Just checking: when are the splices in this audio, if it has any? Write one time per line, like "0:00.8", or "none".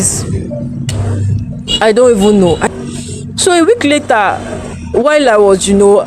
0:02.7